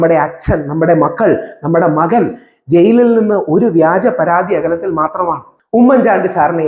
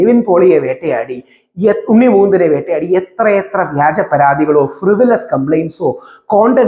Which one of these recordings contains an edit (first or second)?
first